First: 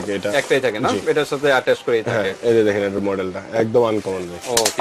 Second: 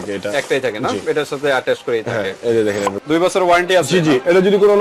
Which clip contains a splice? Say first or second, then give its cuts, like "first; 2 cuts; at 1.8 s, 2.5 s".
second; 1 cut; at 2.9 s